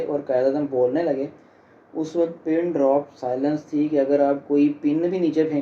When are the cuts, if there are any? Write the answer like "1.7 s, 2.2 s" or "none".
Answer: none